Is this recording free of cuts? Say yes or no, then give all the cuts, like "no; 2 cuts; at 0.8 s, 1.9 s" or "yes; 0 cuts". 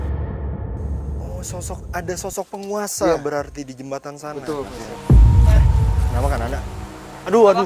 no; 1 cut; at 4.8 s